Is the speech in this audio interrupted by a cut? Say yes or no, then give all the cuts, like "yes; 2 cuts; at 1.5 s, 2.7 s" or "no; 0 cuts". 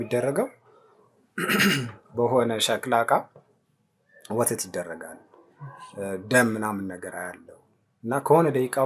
no; 0 cuts